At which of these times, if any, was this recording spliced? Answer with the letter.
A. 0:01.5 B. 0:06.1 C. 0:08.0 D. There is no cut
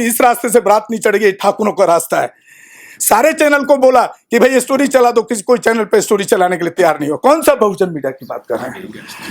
D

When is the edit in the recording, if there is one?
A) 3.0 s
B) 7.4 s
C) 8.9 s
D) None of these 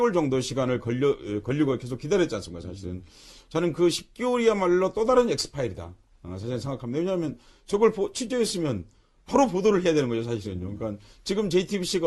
C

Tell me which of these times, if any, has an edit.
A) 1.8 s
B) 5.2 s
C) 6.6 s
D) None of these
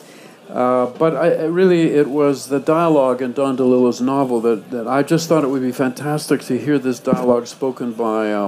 C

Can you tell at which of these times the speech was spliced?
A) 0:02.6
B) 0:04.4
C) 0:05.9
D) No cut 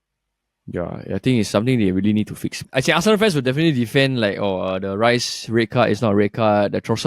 A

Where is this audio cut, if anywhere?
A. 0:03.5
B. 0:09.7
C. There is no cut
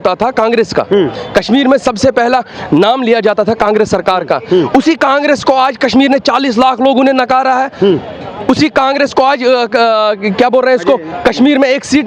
C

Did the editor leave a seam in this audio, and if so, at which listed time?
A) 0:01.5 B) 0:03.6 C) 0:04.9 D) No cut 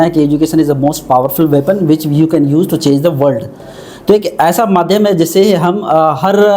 D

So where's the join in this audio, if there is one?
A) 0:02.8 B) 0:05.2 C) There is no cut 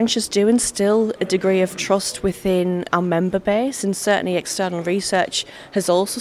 A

